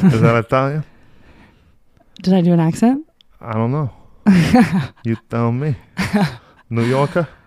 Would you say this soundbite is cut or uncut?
uncut